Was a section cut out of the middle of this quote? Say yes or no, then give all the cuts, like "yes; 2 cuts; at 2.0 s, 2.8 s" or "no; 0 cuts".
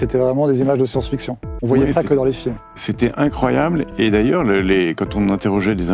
no; 0 cuts